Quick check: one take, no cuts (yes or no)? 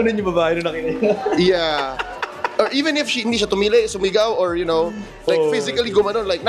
yes